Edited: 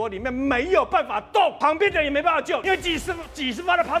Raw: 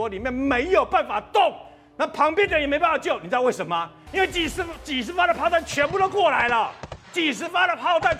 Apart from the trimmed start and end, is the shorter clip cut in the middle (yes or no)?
yes